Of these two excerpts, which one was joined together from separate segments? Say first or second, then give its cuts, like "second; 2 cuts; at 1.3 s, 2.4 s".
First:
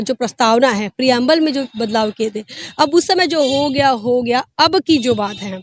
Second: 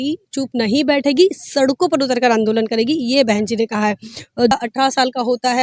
second; 1 cut; at 4.5 s